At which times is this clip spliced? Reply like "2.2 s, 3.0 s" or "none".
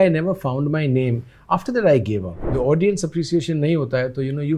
2.4 s